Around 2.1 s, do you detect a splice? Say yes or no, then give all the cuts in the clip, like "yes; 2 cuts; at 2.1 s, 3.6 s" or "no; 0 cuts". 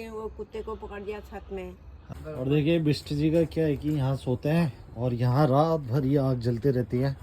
yes; 1 cut; at 2.1 s